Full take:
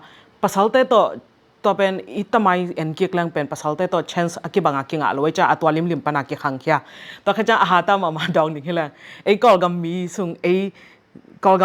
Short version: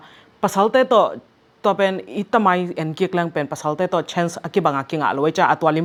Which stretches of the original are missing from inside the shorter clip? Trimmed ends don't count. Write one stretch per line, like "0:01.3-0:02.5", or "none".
none